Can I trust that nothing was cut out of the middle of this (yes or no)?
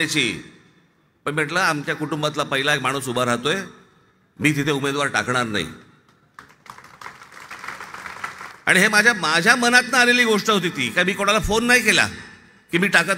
no